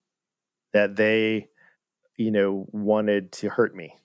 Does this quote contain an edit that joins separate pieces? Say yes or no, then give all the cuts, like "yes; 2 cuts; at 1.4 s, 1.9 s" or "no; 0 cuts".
no; 0 cuts